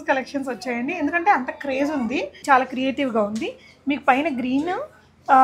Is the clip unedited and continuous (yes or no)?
no